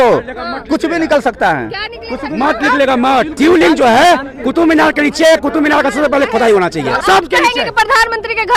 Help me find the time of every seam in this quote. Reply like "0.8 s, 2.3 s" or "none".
3.3 s, 7.0 s